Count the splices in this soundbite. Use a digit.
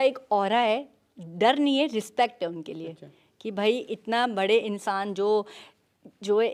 0